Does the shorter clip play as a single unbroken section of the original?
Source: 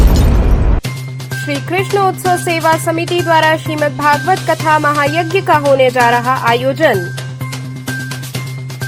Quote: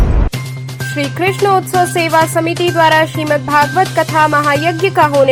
yes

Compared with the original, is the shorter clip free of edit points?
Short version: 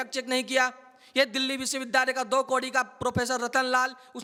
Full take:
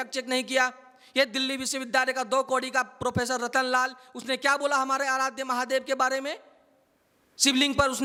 yes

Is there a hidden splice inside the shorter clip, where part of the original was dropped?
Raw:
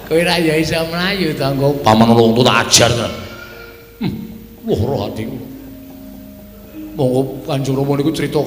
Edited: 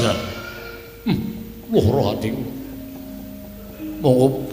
no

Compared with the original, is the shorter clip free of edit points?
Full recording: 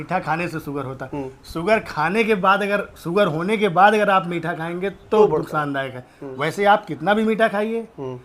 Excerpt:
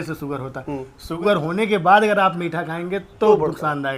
no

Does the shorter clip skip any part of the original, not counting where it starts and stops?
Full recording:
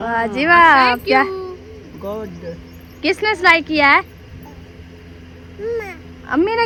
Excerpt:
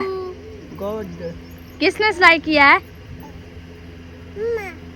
no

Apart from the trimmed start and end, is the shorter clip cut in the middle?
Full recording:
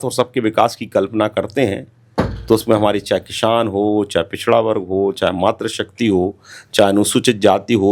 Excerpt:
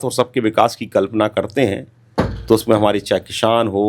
no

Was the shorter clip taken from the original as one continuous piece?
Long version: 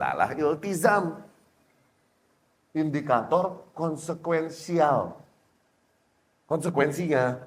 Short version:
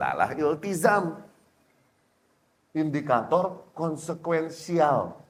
yes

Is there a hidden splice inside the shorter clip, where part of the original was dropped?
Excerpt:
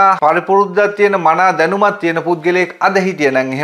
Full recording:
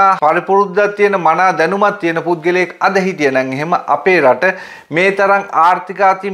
no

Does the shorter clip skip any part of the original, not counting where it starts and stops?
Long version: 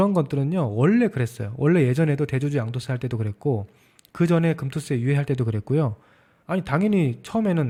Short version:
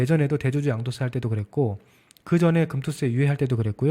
no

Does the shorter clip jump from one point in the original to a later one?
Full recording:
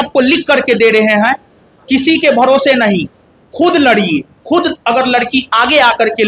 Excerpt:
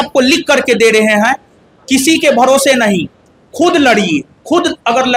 no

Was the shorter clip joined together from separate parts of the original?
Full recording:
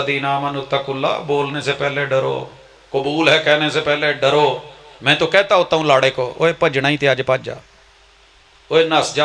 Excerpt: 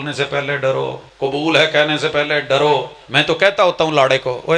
yes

